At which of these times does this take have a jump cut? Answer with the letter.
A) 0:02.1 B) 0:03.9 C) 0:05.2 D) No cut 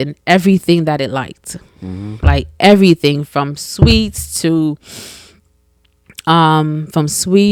D